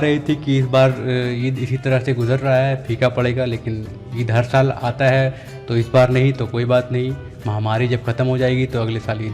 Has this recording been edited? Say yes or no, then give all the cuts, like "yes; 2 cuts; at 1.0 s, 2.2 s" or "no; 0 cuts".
no; 0 cuts